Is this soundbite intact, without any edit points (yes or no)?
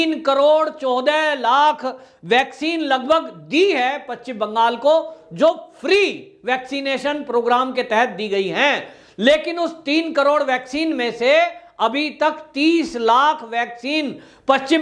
yes